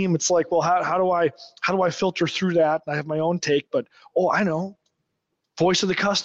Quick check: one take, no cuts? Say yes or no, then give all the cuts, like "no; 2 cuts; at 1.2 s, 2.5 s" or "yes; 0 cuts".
yes; 0 cuts